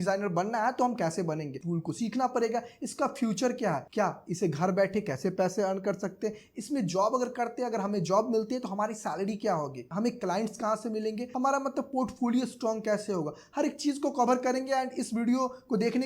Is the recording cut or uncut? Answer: cut